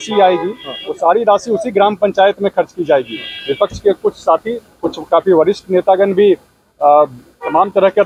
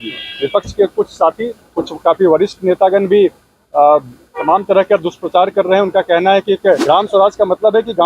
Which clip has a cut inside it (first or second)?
second